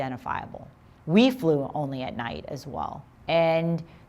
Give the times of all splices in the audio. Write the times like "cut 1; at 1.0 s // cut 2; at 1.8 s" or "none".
cut 1; at 3.1 s